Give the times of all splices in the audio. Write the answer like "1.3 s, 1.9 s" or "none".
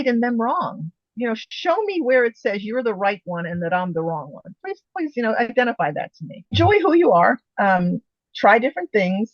6.5 s